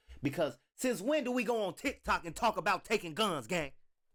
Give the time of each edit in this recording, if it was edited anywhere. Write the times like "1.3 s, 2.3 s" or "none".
none